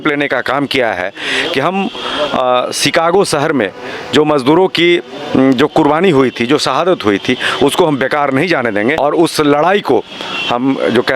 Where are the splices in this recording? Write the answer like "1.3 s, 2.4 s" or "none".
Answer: 9.0 s